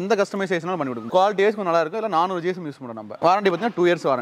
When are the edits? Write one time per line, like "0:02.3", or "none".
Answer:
0:01.1
0:03.0